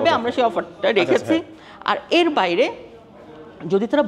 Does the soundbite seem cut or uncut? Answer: uncut